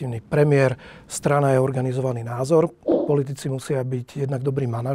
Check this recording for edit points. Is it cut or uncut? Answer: cut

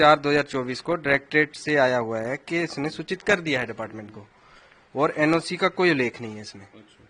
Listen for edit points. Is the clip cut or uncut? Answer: uncut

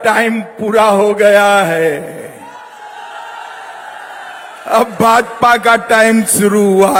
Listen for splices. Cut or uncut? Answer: uncut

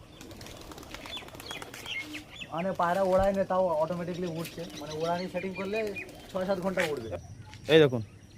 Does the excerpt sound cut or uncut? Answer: cut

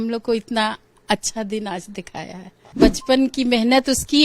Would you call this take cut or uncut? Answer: cut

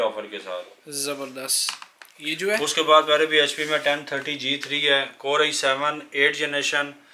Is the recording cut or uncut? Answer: uncut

